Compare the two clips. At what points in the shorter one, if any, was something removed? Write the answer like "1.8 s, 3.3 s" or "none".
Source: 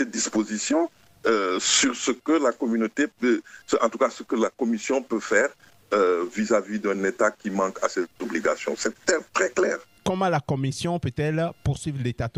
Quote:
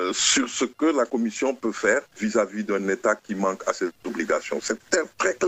1.1 s, 2.1 s